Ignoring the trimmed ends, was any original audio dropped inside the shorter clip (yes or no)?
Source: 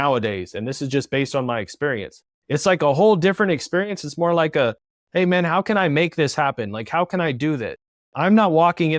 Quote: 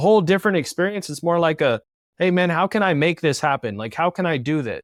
no